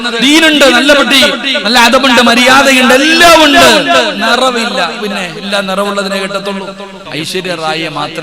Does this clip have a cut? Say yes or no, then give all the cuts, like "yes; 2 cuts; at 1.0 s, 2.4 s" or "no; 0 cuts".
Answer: yes; 1 cut; at 7.1 s